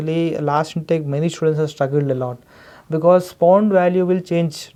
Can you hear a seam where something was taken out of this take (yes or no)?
no